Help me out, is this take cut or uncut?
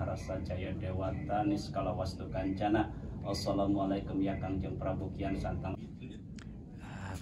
uncut